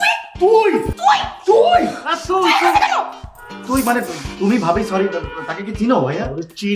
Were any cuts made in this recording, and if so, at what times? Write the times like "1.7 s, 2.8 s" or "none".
0.9 s